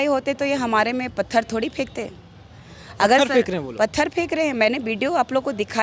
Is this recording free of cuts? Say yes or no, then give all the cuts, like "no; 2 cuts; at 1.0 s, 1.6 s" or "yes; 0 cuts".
yes; 0 cuts